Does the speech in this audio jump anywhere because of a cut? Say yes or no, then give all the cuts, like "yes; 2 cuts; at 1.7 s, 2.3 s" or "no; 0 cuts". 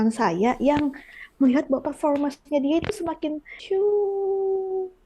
yes; 1 cut; at 3.5 s